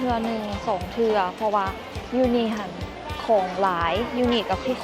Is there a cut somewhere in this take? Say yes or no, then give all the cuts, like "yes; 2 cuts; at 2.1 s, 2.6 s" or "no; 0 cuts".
no; 0 cuts